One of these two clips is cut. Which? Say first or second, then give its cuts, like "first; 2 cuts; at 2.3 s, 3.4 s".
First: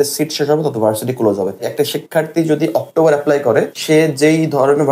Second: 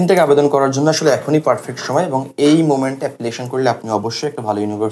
first; 2 cuts; at 1.7 s, 3.8 s